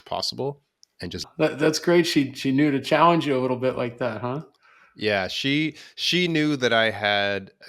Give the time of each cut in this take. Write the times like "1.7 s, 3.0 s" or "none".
1.2 s